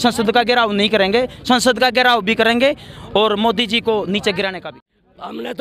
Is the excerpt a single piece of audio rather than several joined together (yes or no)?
no